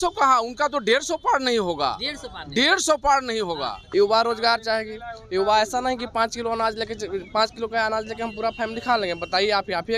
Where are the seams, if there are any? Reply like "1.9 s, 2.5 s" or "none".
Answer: 3.7 s